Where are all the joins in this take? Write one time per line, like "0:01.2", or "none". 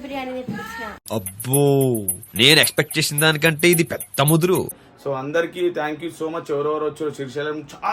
0:04.8